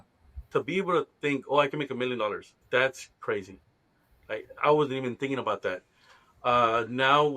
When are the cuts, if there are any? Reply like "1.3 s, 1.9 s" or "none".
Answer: 2.5 s